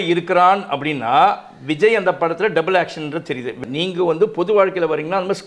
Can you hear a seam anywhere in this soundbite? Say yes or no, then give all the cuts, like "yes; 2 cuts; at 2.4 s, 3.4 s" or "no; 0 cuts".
yes; 1 cut; at 3.6 s